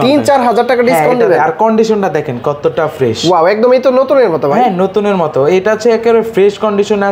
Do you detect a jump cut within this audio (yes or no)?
no